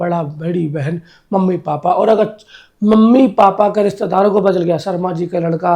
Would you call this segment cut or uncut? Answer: uncut